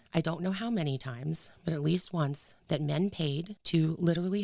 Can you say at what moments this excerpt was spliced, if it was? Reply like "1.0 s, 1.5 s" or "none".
3.5 s